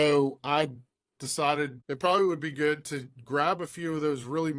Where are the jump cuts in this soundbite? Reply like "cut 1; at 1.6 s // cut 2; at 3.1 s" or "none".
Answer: cut 1; at 1.8 s